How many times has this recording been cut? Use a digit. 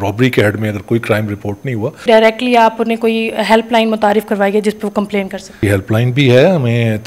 2